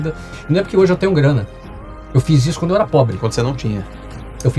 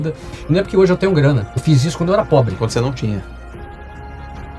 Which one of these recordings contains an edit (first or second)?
second